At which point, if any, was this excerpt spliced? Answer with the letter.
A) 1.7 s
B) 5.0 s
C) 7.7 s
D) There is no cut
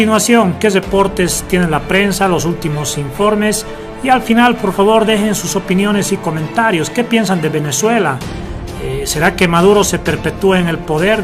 A